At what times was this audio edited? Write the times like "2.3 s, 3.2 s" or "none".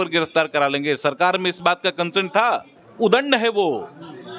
2.8 s